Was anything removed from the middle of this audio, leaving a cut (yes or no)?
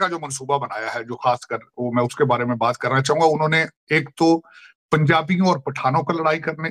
no